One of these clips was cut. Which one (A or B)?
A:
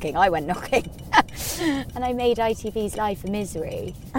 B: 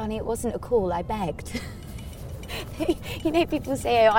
A